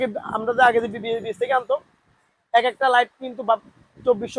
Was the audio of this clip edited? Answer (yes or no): no